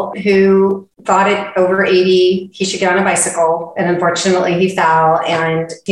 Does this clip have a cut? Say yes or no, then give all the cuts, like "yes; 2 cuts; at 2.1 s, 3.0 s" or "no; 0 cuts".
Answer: no; 0 cuts